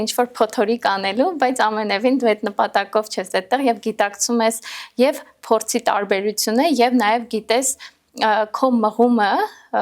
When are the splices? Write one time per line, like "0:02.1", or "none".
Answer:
none